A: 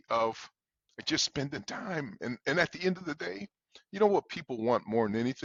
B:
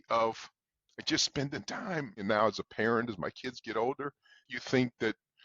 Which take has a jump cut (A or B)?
B